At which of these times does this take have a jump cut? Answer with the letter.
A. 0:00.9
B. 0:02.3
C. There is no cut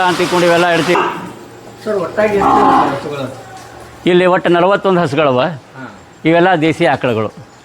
A